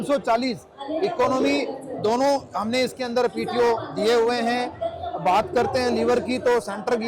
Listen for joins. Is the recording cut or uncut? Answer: uncut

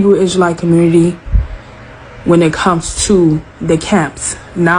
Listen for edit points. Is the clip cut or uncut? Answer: uncut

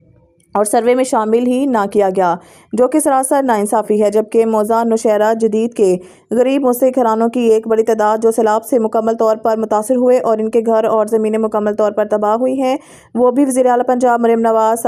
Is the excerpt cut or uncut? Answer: uncut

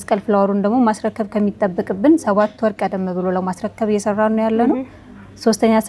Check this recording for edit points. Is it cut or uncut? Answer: uncut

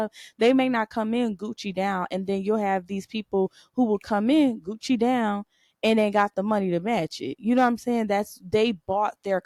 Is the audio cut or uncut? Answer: uncut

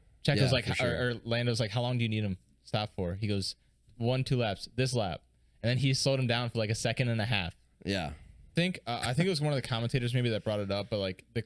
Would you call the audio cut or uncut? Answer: cut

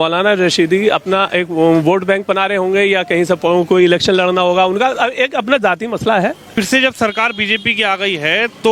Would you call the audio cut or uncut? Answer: cut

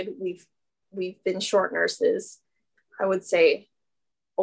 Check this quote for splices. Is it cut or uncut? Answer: uncut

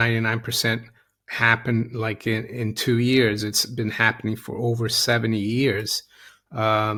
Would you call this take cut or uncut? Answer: uncut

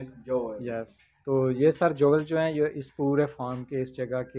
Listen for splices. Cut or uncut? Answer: uncut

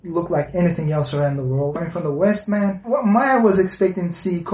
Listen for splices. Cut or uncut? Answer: cut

